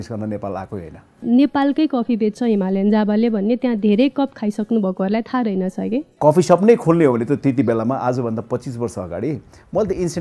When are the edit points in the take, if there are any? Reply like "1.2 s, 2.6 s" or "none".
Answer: 1.2 s, 6.1 s